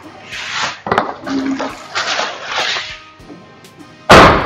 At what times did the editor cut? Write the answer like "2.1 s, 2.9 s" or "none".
none